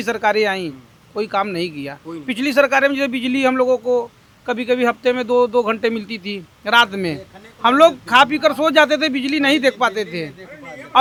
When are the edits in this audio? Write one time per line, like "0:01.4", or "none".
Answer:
none